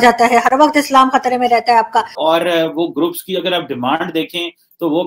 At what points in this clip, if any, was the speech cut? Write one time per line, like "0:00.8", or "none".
0:02.1